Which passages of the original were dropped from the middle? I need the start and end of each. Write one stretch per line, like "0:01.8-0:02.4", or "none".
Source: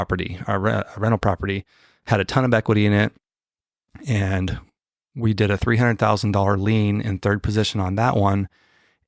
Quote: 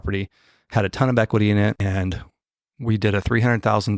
0:03.2-0:04.2